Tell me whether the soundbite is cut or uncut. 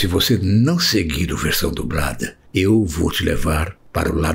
uncut